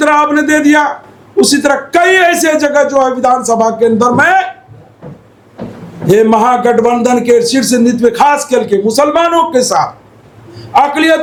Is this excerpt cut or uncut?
uncut